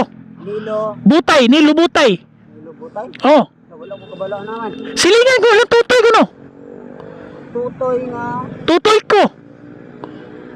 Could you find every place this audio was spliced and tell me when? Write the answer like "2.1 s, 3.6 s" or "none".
none